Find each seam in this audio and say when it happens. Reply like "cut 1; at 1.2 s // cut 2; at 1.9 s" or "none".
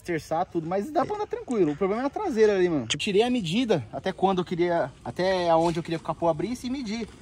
cut 1; at 2.9 s